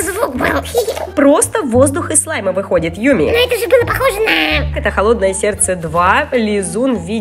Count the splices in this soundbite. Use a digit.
2